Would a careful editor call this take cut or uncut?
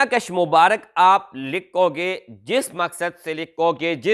uncut